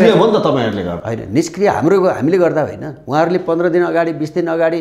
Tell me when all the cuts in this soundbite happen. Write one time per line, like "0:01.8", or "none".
none

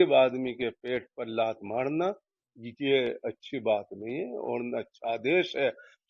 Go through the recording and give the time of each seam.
none

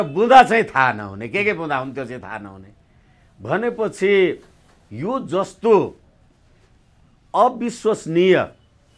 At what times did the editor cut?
none

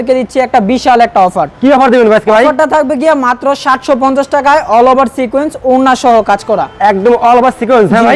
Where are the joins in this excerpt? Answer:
none

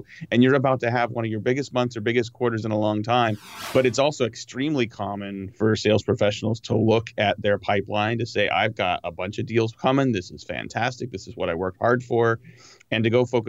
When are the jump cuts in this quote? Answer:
0:03.5
0:05.6

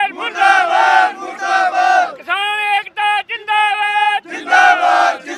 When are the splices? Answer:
none

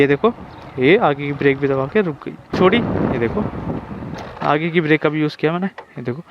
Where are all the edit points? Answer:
0:02.5

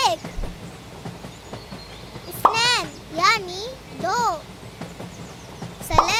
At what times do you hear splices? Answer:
none

